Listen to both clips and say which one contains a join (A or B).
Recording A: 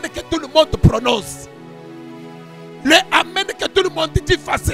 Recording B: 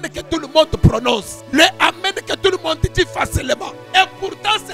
B